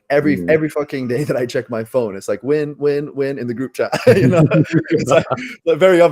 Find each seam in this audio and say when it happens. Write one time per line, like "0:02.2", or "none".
none